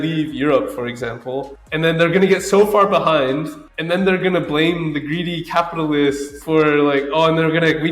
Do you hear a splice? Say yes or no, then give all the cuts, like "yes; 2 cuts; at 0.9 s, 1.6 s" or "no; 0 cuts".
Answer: yes; 1 cut; at 6.3 s